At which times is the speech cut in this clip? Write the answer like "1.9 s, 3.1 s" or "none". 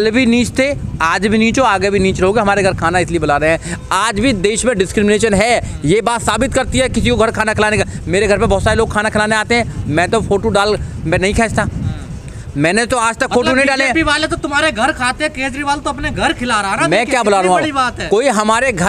none